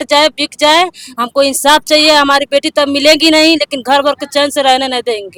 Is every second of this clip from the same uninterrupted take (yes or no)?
yes